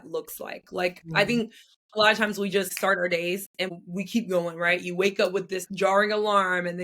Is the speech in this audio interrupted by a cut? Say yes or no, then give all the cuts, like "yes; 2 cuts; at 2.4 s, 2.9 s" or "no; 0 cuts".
yes; 3 cuts; at 2.7 s, 3.8 s, 5.6 s